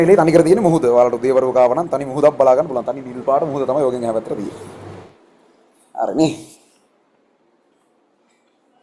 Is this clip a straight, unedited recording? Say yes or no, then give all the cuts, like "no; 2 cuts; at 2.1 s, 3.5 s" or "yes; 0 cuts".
yes; 0 cuts